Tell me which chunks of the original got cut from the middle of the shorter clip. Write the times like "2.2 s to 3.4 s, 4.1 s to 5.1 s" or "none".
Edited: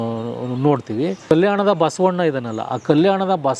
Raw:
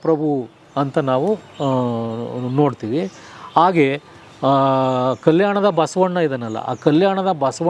3.2 s to 5.2 s